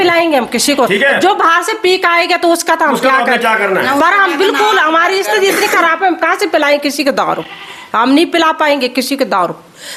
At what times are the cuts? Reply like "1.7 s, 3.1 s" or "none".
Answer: none

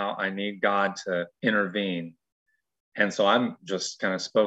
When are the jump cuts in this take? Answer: 1.3 s

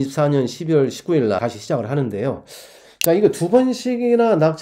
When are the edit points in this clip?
1.4 s

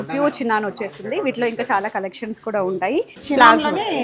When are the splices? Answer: 3.1 s

